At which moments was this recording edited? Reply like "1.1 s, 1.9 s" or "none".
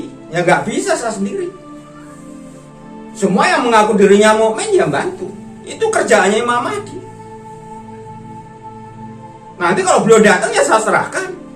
1.7 s, 3.2 s, 7.2 s, 9.4 s